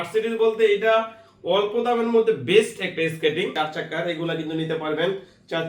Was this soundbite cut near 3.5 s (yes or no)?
yes